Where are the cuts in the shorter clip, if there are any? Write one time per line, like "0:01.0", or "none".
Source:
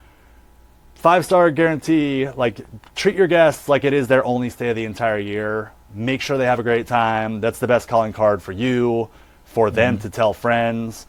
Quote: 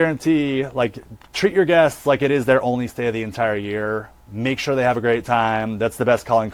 none